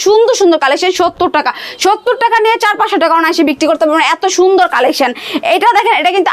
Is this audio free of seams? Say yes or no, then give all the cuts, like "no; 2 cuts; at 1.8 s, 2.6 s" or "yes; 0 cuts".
yes; 0 cuts